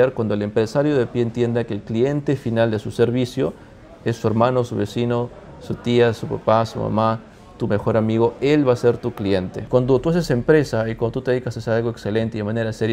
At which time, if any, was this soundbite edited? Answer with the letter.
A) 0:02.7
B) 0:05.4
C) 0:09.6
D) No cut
C